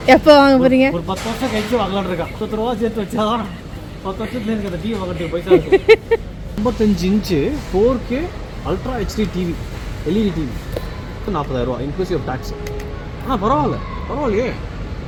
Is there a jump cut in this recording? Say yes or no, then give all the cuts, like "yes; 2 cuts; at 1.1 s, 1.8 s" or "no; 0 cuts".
no; 0 cuts